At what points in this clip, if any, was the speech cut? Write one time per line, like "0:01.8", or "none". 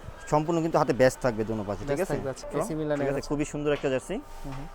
0:02.5